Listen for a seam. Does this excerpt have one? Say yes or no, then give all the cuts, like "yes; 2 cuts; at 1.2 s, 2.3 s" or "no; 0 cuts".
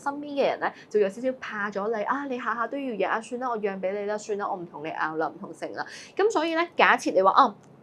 no; 0 cuts